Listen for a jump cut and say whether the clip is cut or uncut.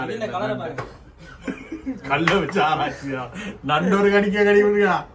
uncut